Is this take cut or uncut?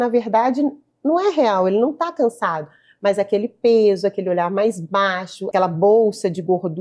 cut